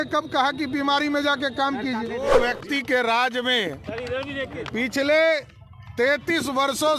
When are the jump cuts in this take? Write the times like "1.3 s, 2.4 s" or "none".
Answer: 2.4 s